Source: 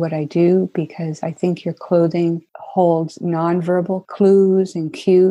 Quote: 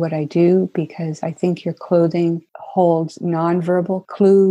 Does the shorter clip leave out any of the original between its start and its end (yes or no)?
no